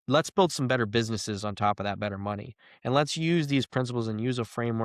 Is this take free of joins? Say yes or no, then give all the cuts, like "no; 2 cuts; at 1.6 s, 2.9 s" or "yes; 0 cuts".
yes; 0 cuts